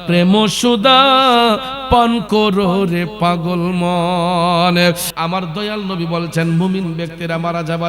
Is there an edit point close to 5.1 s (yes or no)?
yes